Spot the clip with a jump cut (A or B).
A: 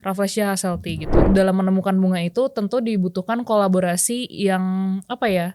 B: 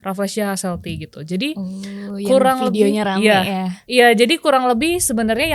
A